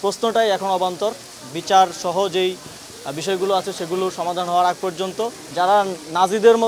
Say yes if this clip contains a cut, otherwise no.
yes